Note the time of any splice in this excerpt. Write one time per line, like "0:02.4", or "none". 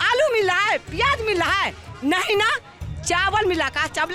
none

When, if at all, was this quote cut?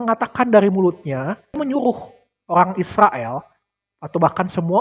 0:01.6

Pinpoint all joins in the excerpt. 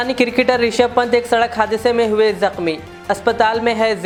none

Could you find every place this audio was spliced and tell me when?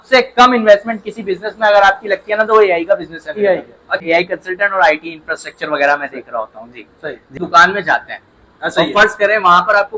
0:04.0
0:07.2

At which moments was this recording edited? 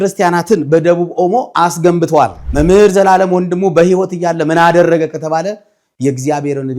0:02.4

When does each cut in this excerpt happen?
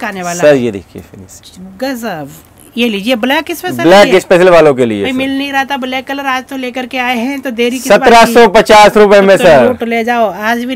none

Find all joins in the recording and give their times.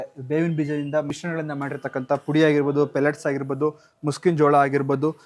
0:01.1

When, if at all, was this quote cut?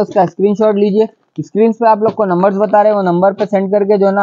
none

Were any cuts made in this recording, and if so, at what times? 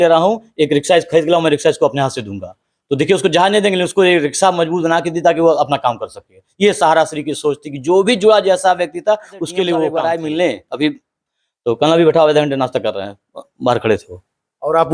0:09.9

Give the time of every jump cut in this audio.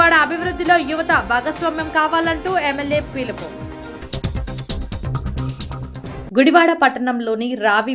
0:06.2

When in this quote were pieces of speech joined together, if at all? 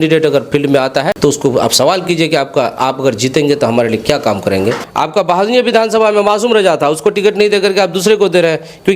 0:01.1
0:04.8

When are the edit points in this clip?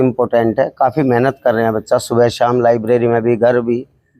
none

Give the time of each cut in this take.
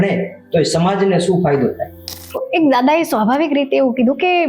0:02.4

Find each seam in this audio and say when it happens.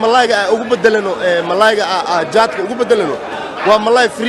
none

